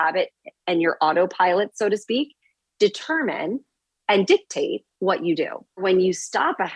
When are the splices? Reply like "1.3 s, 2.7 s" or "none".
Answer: 5.8 s

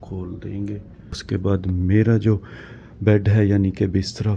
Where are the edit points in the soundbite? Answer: 1.2 s

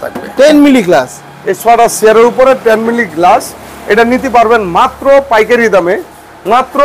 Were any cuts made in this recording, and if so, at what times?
none

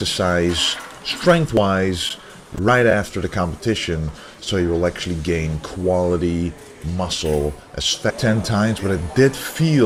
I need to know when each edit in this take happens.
none

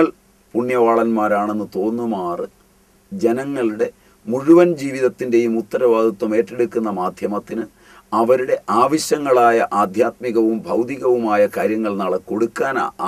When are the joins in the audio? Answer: none

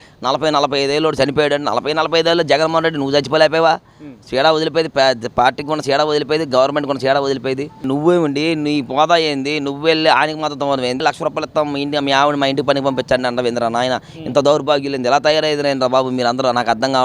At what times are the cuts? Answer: 7.8 s, 11.0 s

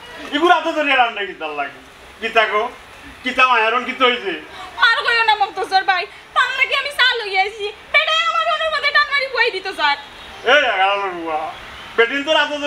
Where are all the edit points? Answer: none

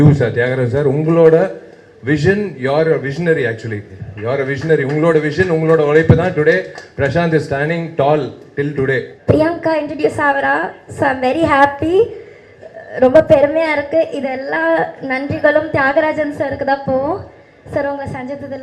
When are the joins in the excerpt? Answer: 9.1 s

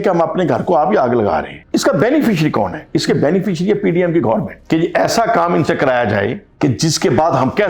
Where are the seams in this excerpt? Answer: 1.6 s, 4.5 s, 6.4 s

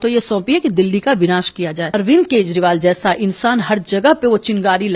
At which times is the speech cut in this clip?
1.8 s

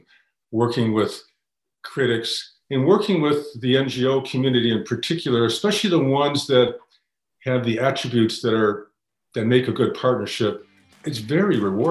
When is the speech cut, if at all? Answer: 11.0 s

